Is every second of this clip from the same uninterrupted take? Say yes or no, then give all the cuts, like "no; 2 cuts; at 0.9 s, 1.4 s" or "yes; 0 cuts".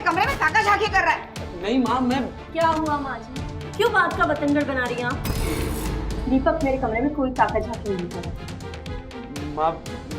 yes; 0 cuts